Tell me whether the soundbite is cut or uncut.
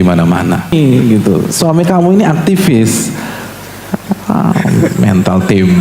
cut